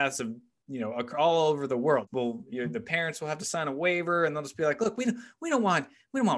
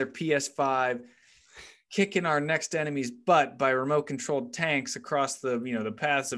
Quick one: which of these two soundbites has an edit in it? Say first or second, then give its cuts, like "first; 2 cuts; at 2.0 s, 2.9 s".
first; 1 cut; at 2.0 s